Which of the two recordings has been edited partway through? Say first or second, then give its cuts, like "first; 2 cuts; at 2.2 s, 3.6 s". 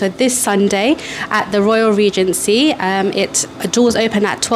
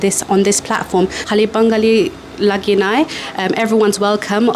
second; 1 cut; at 1.2 s